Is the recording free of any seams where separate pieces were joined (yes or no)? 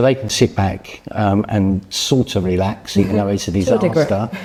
yes